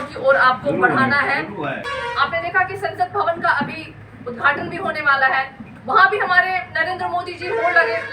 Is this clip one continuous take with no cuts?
no; 1 cut; at 1.8 s

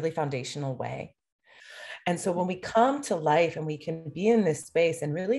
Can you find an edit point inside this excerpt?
yes; 1 cut; at 1.6 s

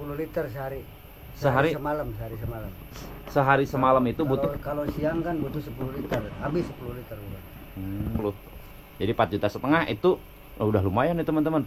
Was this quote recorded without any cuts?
no; 1 cut; at 8.2 s

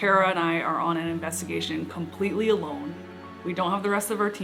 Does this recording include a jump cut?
no; 0 cuts

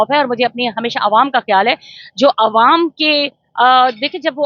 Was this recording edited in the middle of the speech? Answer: no; 0 cuts

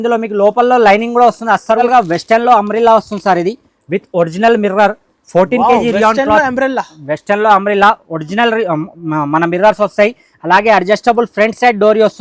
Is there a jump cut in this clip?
yes; 1 cut; at 1.8 s

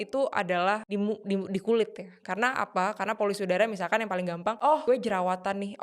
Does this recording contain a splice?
yes; 2 cuts; at 0.8 s, 4.7 s

